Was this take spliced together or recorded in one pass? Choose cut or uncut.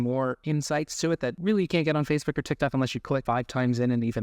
cut